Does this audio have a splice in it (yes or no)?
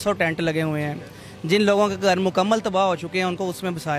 no